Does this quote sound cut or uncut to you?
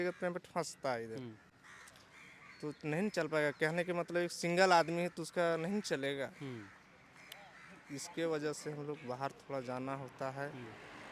uncut